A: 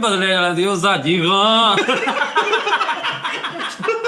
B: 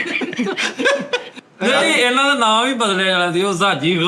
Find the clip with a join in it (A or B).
B